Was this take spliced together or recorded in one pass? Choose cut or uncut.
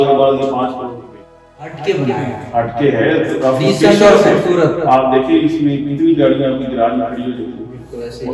cut